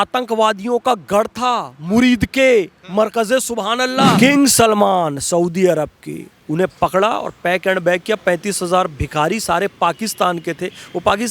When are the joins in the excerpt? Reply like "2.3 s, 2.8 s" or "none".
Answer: 4.2 s